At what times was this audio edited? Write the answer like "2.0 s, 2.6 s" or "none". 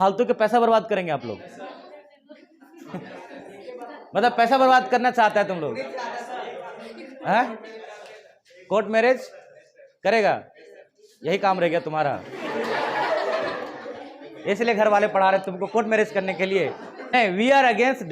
17.0 s